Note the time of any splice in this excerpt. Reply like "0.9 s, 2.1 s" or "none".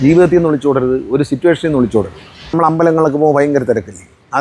2.5 s